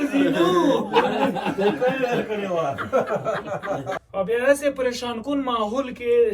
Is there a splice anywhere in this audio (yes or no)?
yes